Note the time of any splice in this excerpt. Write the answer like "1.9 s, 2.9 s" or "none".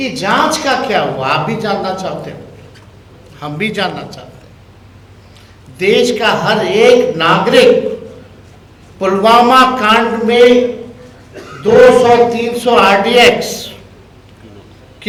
none